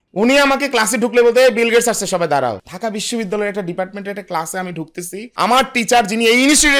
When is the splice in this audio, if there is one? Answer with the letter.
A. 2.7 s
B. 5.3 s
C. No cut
A